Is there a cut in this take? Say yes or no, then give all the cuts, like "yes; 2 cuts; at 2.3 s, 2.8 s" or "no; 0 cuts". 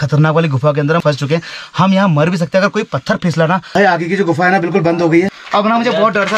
yes; 3 cuts; at 1.0 s, 3.7 s, 5.4 s